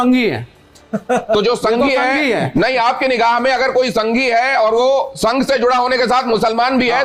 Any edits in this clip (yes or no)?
no